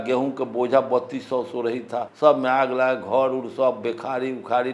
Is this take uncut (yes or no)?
yes